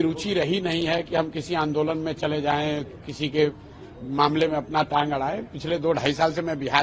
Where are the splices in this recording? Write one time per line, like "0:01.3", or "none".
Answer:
none